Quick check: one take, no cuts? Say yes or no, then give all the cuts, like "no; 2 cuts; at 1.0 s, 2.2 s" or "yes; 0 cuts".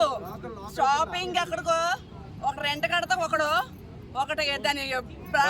yes; 0 cuts